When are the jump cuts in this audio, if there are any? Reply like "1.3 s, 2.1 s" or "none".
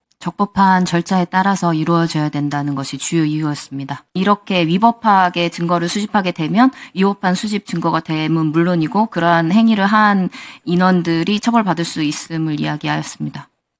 4.0 s